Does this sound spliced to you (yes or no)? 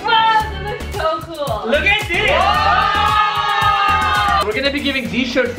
yes